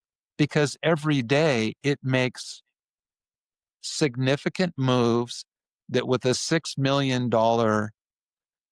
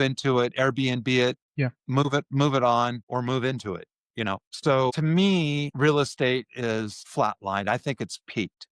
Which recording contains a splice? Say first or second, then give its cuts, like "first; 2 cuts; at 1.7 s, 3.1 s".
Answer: second; 5 cuts; at 1.5 s, 3.0 s, 4.5 s, 5.7 s, 7.0 s